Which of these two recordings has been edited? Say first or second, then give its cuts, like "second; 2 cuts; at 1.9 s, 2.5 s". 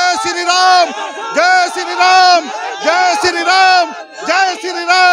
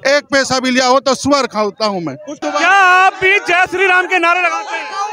second; 1 cut; at 2.3 s